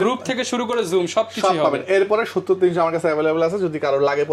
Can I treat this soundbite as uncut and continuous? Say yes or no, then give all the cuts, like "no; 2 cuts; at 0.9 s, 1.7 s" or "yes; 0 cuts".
yes; 0 cuts